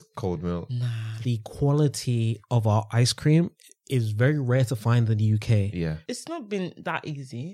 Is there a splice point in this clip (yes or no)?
yes